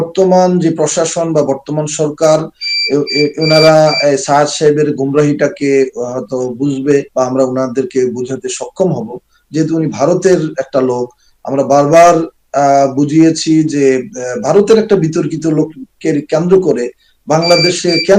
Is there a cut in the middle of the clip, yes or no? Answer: no